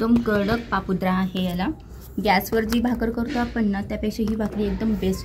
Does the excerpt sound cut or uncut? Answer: uncut